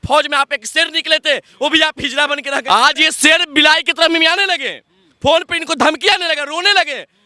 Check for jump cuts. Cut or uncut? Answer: cut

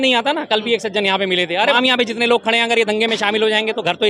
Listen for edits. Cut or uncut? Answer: cut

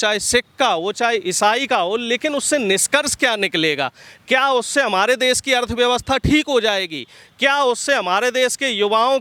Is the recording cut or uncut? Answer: uncut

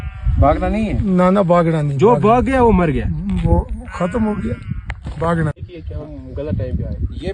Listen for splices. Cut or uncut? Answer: uncut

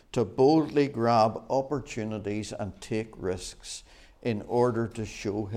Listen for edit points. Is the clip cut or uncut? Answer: uncut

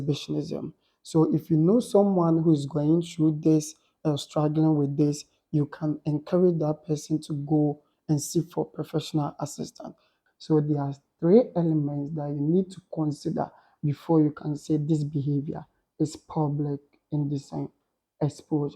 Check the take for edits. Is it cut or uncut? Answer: cut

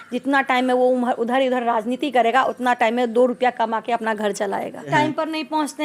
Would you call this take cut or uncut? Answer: cut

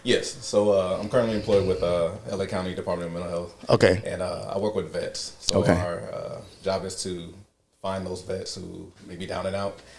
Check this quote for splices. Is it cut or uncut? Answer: uncut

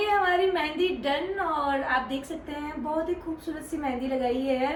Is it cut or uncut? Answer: uncut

